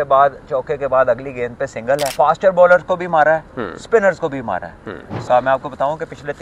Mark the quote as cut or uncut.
cut